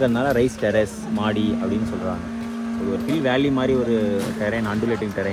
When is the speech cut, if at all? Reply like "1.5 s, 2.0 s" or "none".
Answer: none

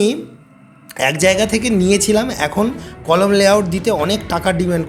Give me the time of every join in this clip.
none

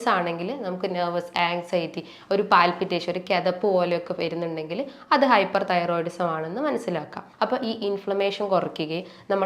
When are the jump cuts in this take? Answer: 7.2 s

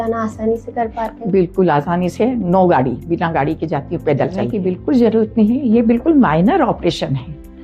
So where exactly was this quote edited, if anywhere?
4.5 s

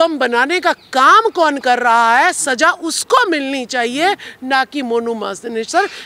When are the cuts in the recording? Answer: none

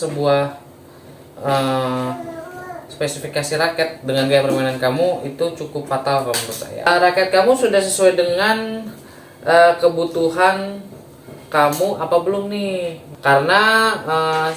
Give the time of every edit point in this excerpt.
6.9 s, 13.0 s

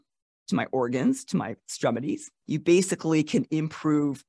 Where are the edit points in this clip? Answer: 2.3 s

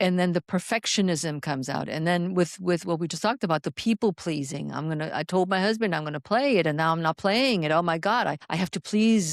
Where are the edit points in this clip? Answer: 8.4 s

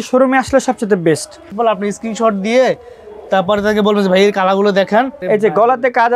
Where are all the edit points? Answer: 1.4 s, 5.2 s

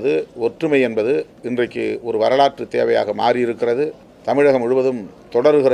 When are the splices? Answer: 4.1 s

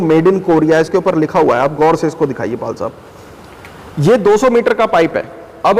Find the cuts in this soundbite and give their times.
none

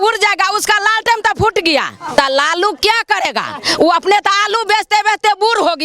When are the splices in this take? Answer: 2.2 s

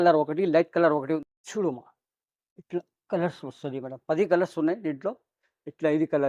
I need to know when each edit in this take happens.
1.2 s

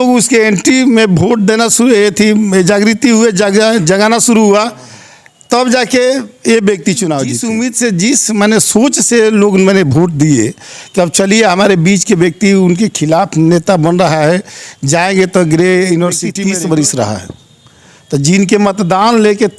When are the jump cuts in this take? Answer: 7.4 s, 16.3 s

